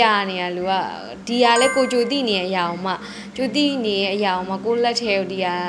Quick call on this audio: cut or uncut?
uncut